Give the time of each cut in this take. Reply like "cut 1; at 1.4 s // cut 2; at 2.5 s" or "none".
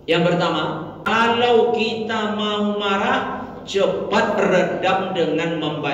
cut 1; at 1.0 s